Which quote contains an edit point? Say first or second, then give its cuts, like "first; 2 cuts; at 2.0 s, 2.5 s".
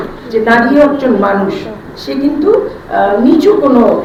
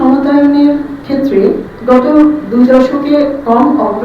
second; 1 cut; at 1.3 s